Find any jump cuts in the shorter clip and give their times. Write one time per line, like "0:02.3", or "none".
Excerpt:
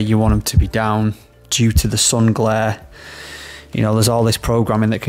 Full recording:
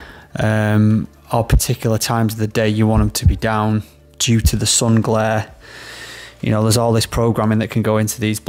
none